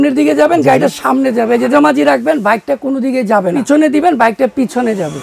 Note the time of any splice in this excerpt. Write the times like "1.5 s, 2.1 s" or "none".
1.7 s, 3.6 s